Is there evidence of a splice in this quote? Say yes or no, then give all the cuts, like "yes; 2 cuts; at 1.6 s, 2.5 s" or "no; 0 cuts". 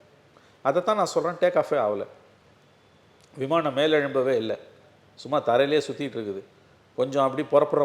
no; 0 cuts